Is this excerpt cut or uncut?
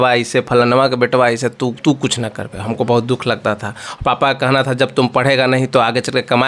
uncut